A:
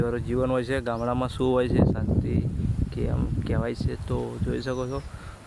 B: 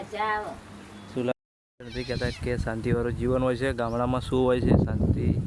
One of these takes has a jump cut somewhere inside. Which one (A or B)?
B